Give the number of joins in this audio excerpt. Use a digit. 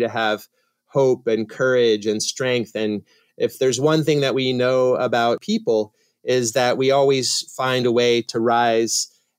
2